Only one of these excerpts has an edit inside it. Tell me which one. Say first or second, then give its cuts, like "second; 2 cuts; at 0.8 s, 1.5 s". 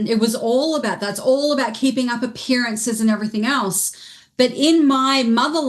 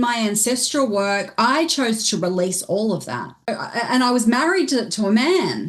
second; 1 cut; at 3.5 s